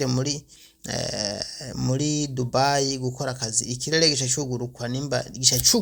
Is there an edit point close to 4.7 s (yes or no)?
no